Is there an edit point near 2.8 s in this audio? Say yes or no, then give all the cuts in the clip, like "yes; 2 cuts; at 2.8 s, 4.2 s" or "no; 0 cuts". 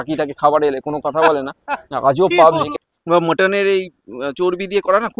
yes; 1 cut; at 2.8 s